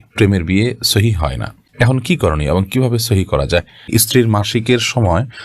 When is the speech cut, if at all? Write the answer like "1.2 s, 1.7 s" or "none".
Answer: 3.8 s

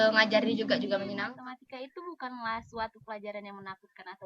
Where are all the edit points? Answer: 1.2 s

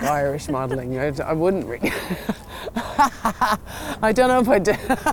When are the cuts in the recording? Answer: none

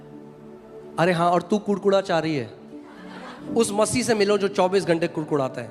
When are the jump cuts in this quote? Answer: 3.3 s

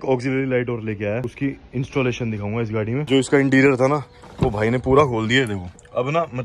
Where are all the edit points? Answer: 1.3 s, 3.0 s

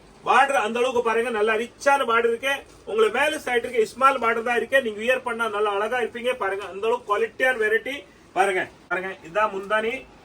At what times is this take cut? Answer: 8.8 s

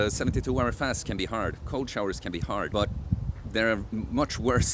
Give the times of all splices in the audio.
2.7 s

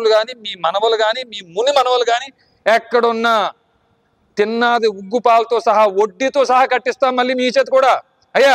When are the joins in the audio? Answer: none

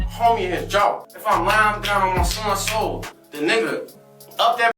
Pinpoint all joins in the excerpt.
1.1 s

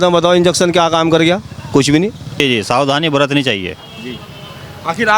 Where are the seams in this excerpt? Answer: 2.3 s

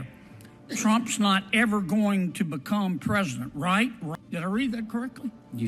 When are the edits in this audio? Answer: 4.0 s

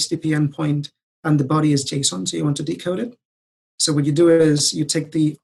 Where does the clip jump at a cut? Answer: none

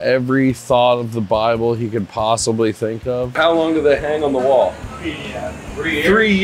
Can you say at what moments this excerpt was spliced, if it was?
3.4 s

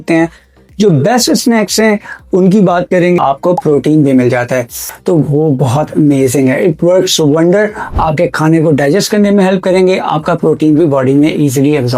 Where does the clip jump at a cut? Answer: 3.2 s, 4.9 s

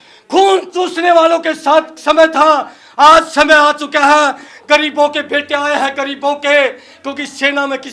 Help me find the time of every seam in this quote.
none

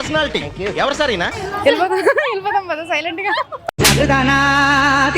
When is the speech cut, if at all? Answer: 1.4 s

